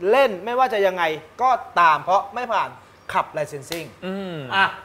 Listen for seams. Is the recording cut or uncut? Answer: uncut